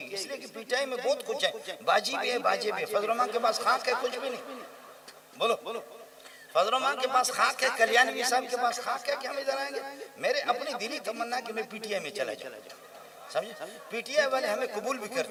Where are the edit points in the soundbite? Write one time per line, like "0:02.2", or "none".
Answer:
none